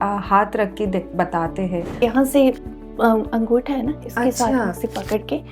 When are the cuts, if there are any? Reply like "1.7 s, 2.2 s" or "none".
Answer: 2.0 s